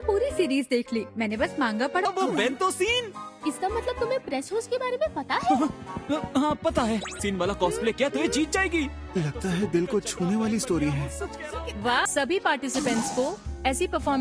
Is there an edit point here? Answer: yes; 3 cuts; at 2.0 s, 7.2 s, 12.1 s

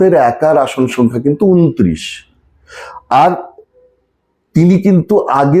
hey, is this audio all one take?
yes; 0 cuts

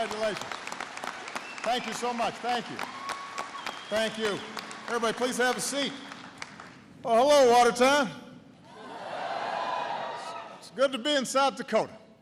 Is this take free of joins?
yes; 0 cuts

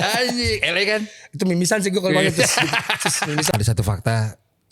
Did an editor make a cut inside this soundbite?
yes; 1 cut; at 3.5 s

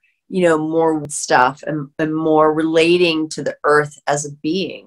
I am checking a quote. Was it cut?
yes; 1 cut; at 1.0 s

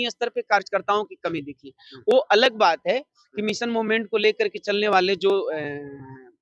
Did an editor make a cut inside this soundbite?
no; 0 cuts

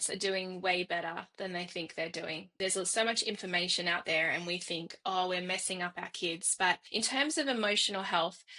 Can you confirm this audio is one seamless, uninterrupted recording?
no; 2 cuts; at 2.5 s, 6.8 s

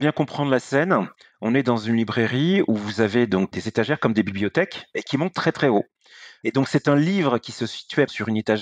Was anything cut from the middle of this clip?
no; 0 cuts

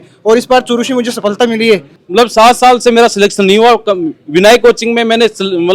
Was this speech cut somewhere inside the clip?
yes; 1 cut; at 2.0 s

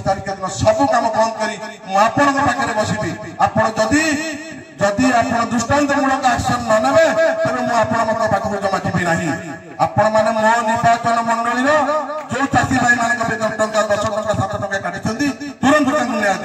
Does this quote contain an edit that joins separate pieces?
no; 0 cuts

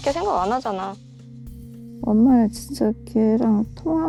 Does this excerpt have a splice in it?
no; 0 cuts

